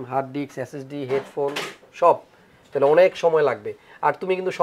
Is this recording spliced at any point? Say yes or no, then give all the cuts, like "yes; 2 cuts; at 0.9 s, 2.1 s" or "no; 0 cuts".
no; 0 cuts